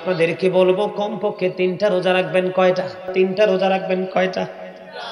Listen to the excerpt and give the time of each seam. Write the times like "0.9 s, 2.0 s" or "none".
3.1 s